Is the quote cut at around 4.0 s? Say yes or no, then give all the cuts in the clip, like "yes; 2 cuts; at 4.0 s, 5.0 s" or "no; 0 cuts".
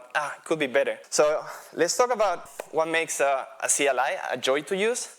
no; 2 cuts; at 1.0 s, 2.4 s